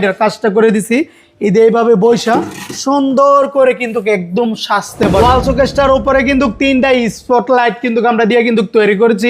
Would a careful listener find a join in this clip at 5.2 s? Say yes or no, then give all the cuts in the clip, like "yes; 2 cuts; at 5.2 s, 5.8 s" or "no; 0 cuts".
yes; 1 cut; at 5.2 s